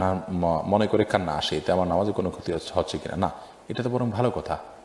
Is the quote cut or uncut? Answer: uncut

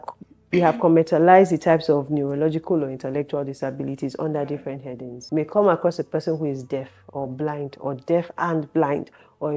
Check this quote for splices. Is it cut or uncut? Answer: cut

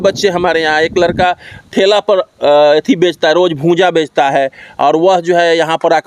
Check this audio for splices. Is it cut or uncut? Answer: uncut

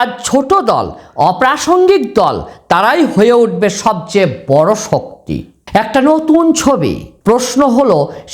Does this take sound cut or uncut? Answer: cut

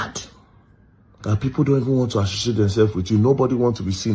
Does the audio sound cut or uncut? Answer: uncut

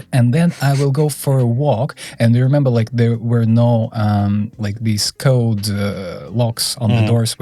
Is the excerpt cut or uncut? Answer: uncut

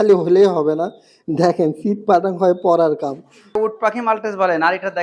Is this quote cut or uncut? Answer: cut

